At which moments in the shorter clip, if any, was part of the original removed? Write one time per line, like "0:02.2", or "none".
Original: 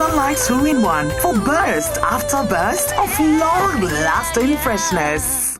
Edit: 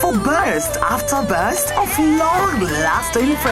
none